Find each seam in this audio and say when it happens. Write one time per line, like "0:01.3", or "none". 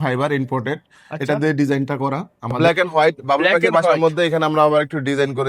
0:02.6